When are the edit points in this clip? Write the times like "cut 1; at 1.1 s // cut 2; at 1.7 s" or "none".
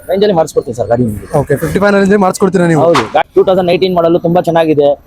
cut 1; at 3.2 s